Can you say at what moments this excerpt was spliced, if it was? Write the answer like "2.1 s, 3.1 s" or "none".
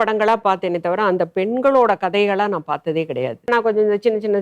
3.5 s